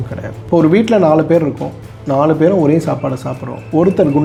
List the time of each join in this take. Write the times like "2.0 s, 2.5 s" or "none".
none